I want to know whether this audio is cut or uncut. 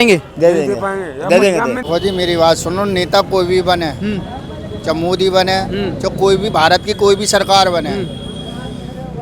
cut